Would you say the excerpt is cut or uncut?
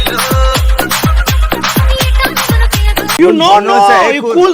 cut